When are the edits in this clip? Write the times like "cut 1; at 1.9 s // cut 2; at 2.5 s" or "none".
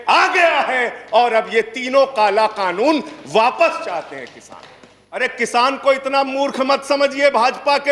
cut 1; at 5.2 s